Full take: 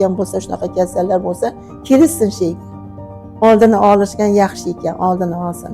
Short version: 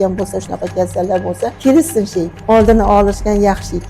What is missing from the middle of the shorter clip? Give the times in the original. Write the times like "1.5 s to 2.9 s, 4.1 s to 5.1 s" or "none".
1.6 s to 1.8 s, 2.6 s to 3.3 s